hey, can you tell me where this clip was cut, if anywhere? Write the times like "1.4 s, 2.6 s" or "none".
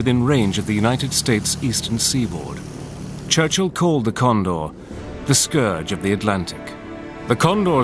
3.4 s